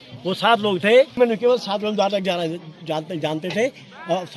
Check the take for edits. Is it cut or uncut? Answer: cut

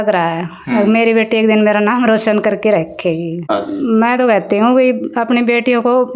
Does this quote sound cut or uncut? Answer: cut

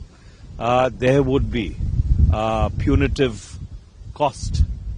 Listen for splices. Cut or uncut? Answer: uncut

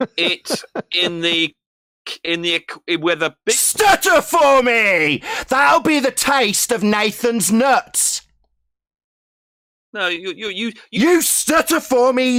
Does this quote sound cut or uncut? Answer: uncut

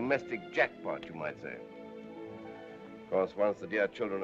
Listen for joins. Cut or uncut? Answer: uncut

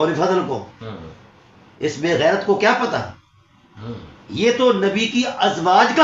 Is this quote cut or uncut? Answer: uncut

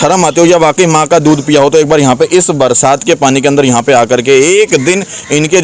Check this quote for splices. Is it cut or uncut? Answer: uncut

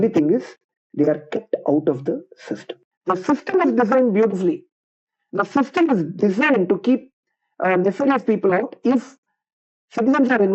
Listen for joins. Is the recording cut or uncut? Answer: cut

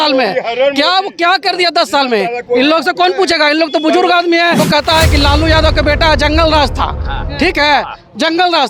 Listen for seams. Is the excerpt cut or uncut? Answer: cut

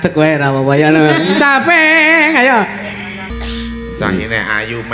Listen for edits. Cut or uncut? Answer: cut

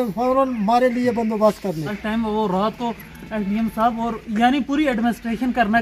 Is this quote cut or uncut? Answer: cut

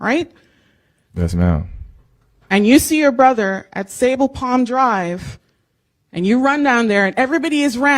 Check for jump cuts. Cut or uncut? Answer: cut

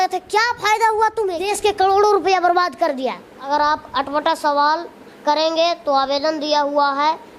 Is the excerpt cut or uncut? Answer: cut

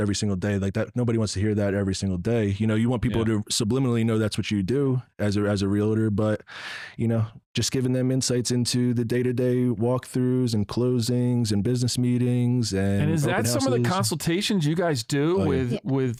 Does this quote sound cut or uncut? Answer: uncut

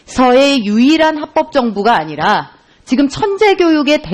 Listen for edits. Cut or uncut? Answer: uncut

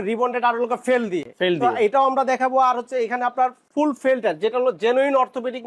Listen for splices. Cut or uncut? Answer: uncut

